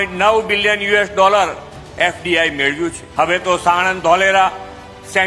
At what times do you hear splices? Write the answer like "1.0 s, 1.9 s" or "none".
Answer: 3.0 s